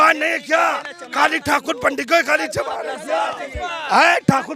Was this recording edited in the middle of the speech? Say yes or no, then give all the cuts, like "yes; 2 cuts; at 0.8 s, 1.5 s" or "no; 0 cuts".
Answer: no; 0 cuts